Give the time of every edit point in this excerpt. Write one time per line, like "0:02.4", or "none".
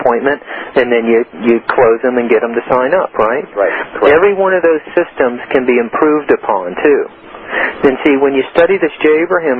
none